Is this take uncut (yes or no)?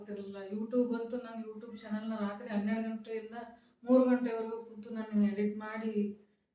yes